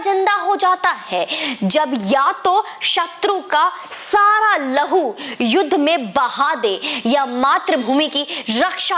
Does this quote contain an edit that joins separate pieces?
no; 0 cuts

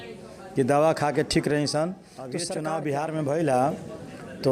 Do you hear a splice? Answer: yes; 1 cut; at 2.4 s

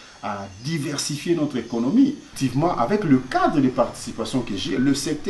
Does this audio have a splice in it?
yes; 1 cut; at 2.3 s

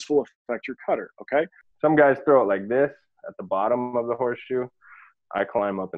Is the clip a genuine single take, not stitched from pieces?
no; 1 cut; at 1.6 s

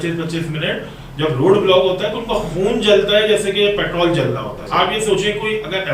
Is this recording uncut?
no; 1 cut; at 4.6 s

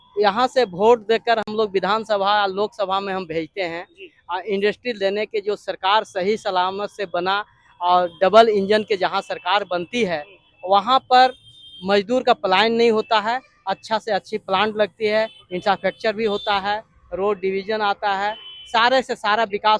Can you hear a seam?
no; 0 cuts

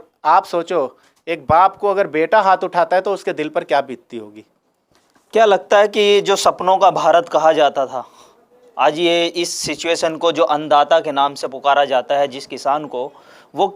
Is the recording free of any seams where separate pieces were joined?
yes; 0 cuts

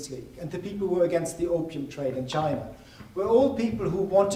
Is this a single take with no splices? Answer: yes; 0 cuts

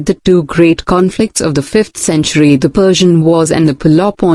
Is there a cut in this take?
no; 0 cuts

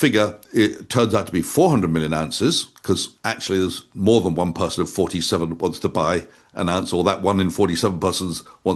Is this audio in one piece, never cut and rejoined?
yes; 0 cuts

